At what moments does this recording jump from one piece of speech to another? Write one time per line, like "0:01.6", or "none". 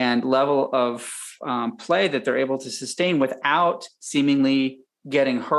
none